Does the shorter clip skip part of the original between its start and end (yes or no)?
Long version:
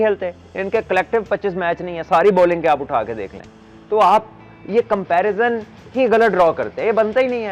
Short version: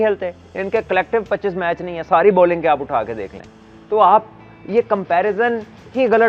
no